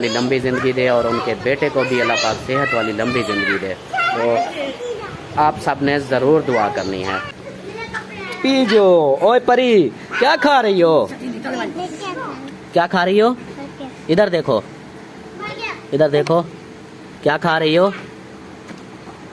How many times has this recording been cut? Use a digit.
0